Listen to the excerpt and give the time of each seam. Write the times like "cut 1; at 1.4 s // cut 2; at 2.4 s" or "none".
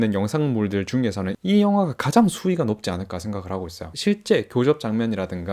cut 1; at 1.3 s